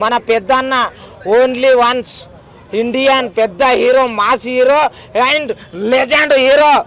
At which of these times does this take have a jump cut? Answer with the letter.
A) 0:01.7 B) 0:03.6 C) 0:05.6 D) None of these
D